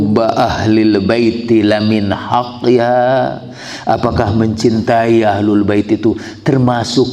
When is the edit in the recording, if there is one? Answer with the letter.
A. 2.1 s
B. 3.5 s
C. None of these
C